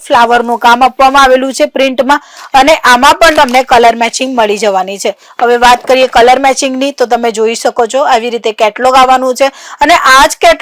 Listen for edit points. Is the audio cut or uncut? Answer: uncut